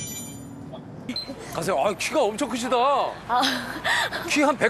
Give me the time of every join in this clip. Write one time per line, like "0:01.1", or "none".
0:01.1